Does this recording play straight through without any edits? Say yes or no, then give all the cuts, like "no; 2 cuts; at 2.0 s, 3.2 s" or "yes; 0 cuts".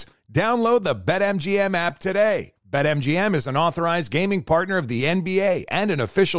yes; 0 cuts